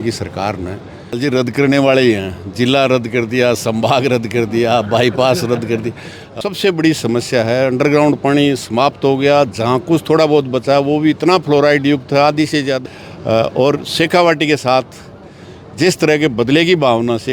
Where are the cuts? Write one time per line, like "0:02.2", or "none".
0:01.2
0:06.3
0:12.8